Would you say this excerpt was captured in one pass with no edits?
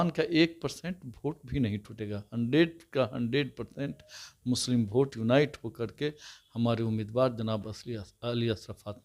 yes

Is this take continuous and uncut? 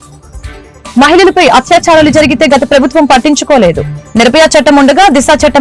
yes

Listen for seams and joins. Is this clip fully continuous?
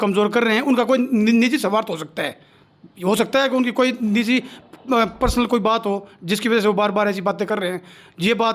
yes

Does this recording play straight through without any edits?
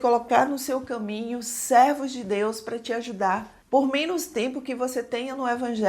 yes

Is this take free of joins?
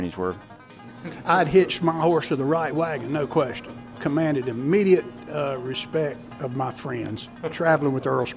no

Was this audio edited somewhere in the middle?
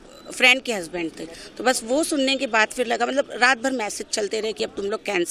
no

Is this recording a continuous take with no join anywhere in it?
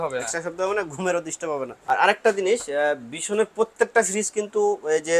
no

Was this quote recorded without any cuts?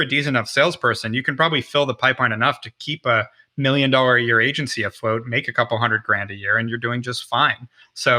yes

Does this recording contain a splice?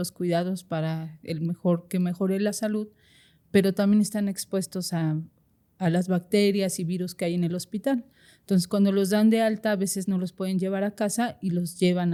no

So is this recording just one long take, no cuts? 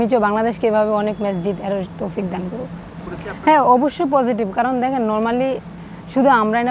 yes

